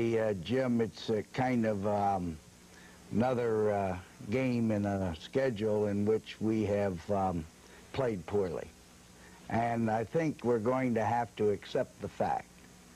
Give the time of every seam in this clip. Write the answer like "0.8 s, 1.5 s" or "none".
5.2 s